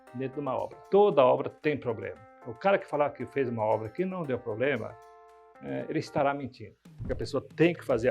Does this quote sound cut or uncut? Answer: cut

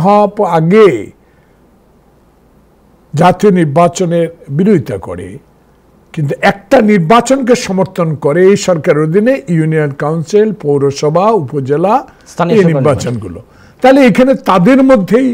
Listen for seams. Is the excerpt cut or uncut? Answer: uncut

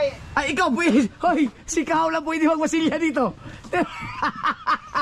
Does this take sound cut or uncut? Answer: uncut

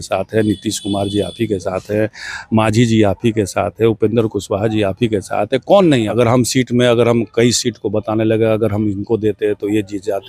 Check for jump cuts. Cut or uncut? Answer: cut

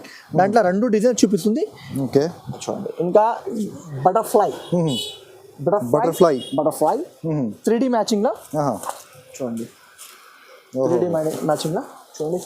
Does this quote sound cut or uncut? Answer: cut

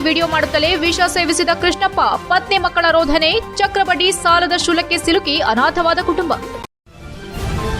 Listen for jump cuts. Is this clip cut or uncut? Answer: cut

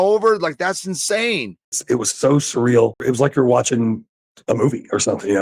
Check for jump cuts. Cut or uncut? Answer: cut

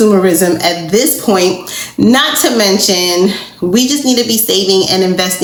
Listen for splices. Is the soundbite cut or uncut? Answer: uncut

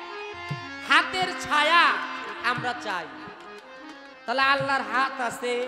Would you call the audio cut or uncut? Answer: uncut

